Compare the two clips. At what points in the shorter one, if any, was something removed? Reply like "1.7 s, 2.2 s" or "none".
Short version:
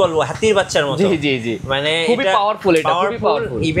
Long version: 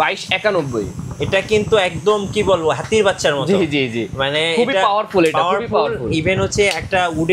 none